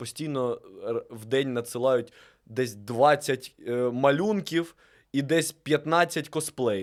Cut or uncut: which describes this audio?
uncut